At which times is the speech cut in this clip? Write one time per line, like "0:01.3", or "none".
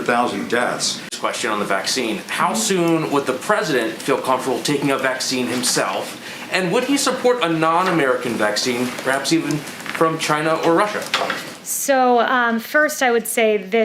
0:01.1